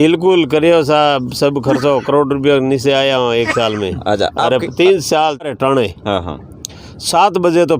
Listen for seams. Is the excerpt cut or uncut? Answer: cut